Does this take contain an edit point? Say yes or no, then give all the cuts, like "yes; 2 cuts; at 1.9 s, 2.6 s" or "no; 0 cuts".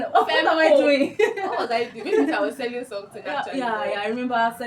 no; 0 cuts